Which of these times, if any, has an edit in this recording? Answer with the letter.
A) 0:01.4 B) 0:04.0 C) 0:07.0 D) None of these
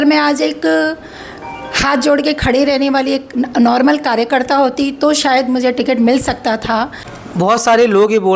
C